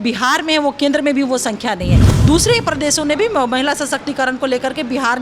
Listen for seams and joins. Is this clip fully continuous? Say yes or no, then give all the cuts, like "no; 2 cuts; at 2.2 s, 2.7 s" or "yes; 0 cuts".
no; 1 cut; at 2.0 s